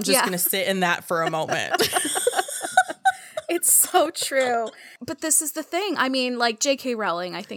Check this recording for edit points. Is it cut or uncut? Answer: cut